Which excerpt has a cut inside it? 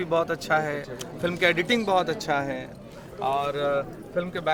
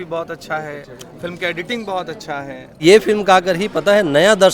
second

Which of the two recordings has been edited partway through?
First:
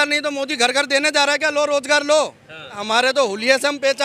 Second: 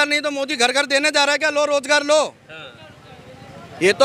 first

